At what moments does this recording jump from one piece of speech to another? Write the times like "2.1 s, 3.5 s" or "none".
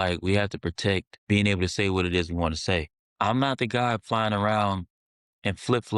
1.1 s, 3.0 s